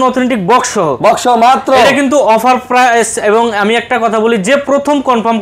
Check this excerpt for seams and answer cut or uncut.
uncut